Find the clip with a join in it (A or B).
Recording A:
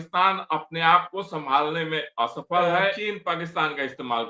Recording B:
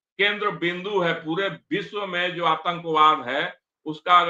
A